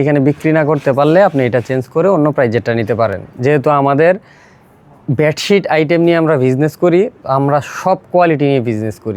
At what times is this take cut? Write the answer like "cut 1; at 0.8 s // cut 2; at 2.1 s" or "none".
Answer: none